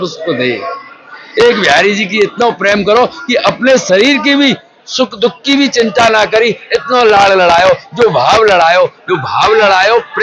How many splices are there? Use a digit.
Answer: 0